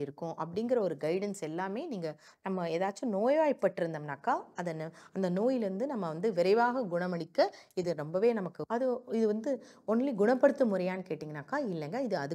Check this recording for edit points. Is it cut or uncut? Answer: cut